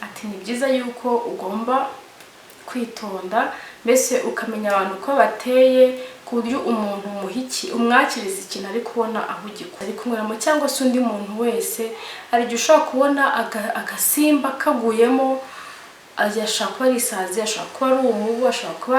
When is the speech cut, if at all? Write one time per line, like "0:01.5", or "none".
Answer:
0:09.7

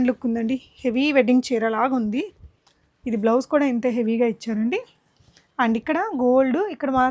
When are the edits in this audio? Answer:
none

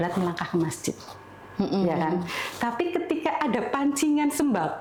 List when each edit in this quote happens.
none

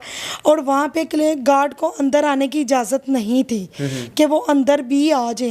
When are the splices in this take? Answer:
none

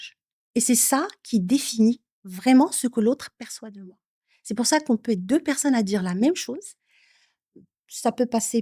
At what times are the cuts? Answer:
none

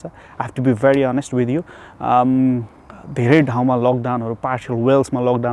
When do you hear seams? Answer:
none

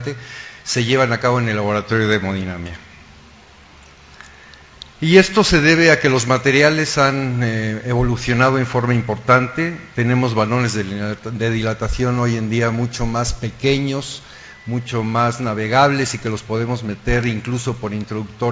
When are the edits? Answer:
0:09.0

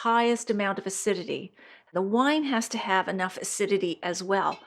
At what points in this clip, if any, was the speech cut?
0:01.9

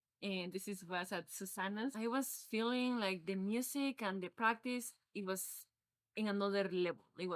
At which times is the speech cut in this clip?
0:01.9

